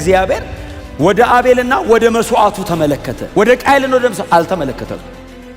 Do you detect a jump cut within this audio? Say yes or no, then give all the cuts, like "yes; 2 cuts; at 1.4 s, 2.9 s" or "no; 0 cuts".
yes; 1 cut; at 3.2 s